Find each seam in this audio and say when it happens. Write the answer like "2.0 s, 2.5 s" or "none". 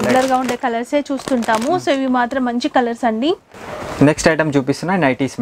3.5 s